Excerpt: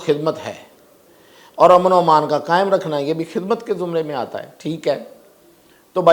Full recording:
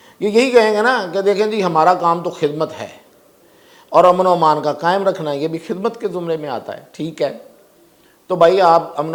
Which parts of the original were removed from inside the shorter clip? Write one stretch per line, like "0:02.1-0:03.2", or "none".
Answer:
none